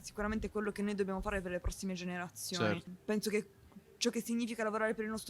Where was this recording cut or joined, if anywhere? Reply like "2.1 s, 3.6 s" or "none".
2.9 s

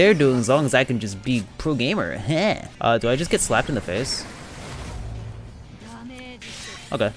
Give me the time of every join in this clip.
2.7 s

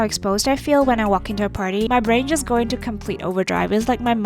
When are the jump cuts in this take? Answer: 1.9 s

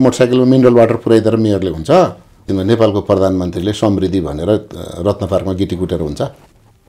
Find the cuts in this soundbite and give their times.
2.4 s

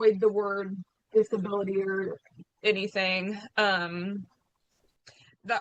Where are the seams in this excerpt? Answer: none

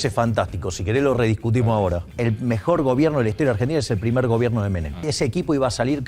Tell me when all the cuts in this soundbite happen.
2.1 s, 5.1 s

